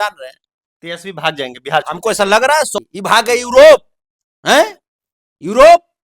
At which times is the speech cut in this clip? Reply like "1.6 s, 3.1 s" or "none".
2.8 s